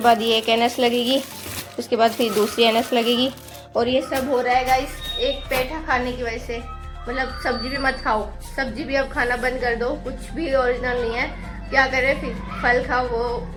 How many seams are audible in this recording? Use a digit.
0